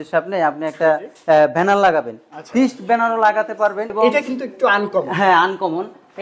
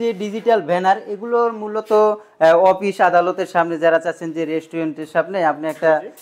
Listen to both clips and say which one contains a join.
first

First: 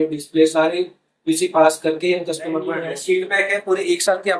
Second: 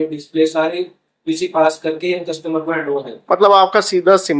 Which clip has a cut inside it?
first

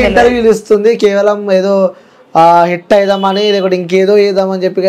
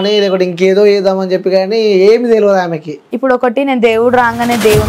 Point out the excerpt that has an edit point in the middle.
second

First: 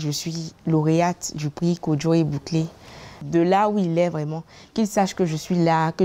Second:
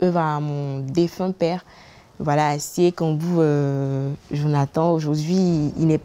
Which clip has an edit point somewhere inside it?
first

